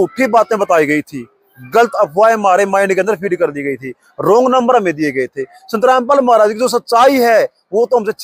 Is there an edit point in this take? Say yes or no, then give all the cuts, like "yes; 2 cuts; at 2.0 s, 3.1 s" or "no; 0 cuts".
no; 0 cuts